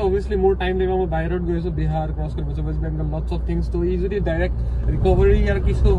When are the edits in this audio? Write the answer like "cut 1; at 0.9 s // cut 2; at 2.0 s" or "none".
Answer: none